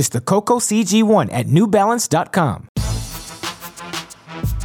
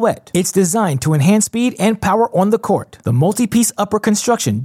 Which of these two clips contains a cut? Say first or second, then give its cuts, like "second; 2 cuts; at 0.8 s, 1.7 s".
first; 1 cut; at 2.7 s